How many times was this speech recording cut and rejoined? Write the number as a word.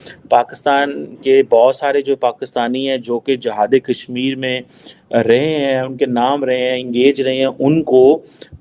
one